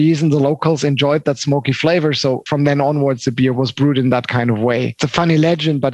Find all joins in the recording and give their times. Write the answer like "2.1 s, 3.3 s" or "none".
2.4 s, 3.5 s, 5.0 s